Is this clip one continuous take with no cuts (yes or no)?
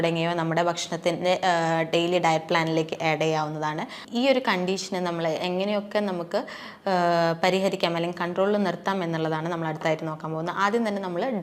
no